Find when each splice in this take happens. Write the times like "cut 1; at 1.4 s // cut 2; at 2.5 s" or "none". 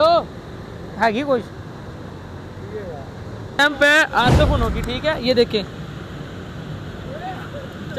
cut 1; at 3.6 s